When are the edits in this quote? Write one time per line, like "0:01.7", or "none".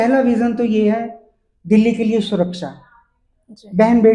none